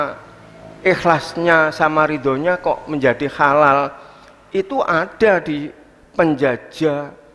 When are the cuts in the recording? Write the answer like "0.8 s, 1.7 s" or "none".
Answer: none